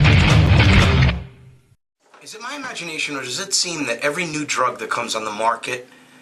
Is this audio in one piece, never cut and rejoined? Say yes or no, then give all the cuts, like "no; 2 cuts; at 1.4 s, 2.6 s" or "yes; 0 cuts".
yes; 0 cuts